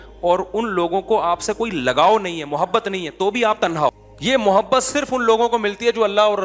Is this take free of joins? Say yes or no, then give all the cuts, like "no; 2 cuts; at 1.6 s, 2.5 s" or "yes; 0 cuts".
no; 1 cut; at 4.0 s